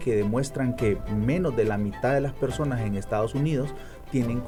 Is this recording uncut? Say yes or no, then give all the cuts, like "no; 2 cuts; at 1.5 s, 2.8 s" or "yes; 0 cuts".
yes; 0 cuts